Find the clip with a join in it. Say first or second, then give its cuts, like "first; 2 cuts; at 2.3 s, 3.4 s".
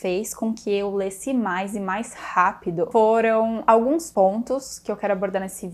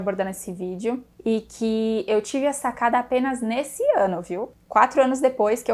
first; 2 cuts; at 2.9 s, 3.8 s